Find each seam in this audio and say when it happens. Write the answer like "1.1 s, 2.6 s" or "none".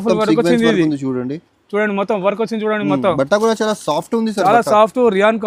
none